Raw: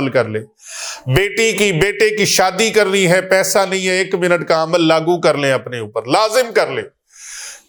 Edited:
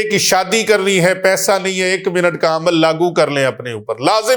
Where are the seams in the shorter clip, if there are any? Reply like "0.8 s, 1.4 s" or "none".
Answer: none